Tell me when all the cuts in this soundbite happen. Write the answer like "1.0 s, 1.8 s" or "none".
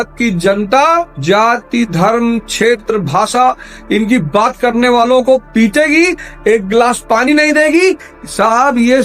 none